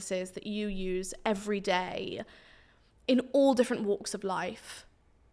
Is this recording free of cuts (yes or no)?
yes